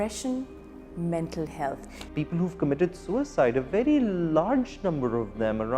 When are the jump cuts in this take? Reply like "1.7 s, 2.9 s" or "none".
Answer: 2.0 s